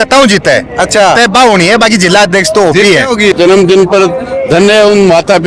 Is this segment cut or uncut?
cut